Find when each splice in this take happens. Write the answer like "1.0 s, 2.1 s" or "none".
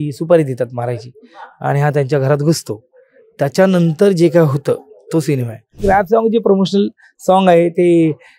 5.8 s